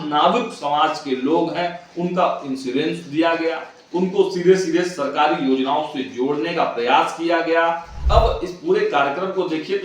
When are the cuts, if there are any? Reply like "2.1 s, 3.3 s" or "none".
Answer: 7.9 s